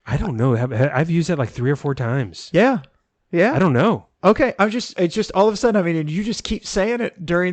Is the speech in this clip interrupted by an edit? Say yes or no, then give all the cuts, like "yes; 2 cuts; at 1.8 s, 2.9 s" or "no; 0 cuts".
no; 0 cuts